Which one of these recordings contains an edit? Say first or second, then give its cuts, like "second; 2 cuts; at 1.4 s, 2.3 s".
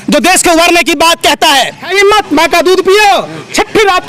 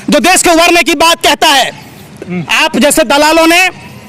first; 1 cut; at 1.8 s